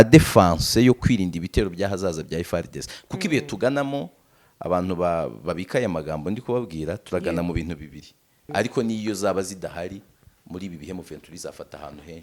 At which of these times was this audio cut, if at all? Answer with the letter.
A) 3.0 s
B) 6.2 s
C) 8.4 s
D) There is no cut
C